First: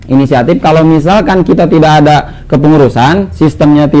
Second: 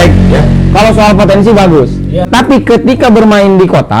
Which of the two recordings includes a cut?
second; 1 cut; at 2.3 s

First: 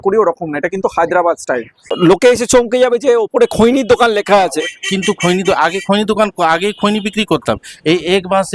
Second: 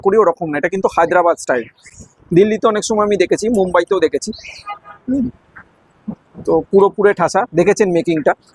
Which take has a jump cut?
first; 1 cut; at 1.8 s

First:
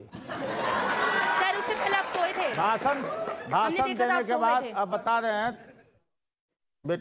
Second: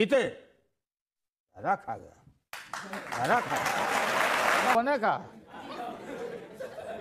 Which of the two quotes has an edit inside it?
second; 1 cut; at 4.8 s

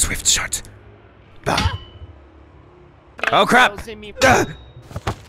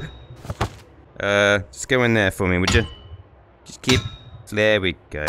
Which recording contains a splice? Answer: first; 1 cut; at 3.1 s

